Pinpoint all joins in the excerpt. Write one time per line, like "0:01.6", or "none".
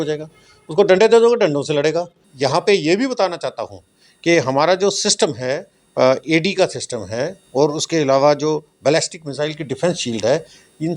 0:02.2